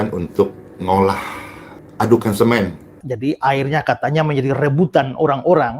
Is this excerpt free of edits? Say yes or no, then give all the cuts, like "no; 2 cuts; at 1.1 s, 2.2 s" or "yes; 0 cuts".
no; 1 cut; at 3.0 s